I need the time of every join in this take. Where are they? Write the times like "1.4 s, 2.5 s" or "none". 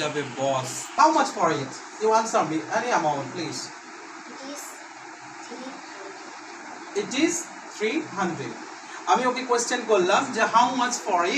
0.9 s